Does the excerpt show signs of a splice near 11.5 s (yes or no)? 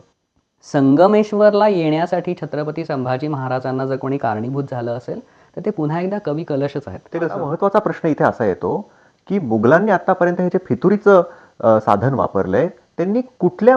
no